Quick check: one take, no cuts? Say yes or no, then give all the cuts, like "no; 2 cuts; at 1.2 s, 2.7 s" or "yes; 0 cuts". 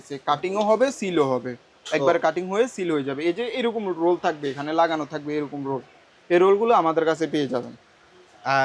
yes; 0 cuts